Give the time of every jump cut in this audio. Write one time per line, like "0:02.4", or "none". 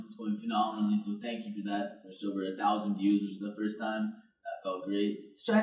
0:01.1